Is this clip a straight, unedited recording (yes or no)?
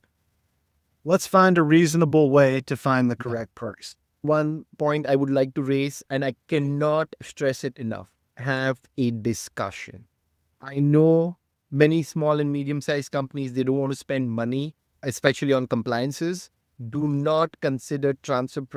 no